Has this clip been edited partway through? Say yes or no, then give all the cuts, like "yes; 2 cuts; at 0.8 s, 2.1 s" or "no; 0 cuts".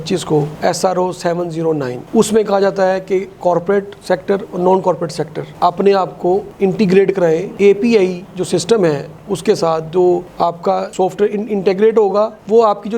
no; 0 cuts